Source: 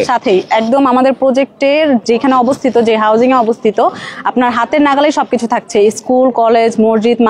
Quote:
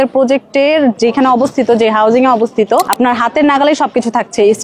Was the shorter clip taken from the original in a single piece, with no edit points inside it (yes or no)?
no